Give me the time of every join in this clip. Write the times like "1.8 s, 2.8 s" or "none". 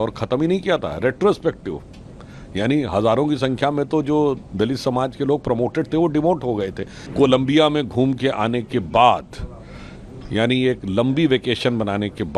7.1 s